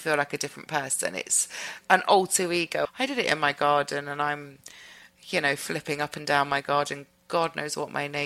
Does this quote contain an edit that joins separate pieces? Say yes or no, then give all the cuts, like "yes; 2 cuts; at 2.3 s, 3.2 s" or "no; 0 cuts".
yes; 1 cut; at 2.9 s